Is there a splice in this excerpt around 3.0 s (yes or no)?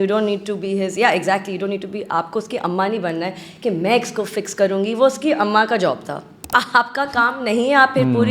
no